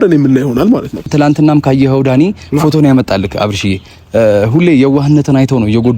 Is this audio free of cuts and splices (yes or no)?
no